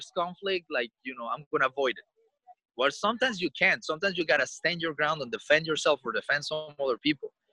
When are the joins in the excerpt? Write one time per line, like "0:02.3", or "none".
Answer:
none